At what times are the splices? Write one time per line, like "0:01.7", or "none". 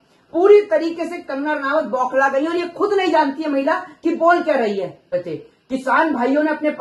0:05.1